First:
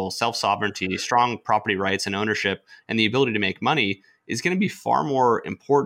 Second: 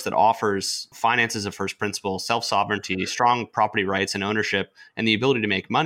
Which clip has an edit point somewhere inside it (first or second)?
second